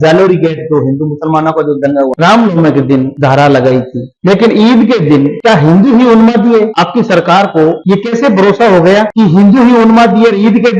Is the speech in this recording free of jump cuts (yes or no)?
no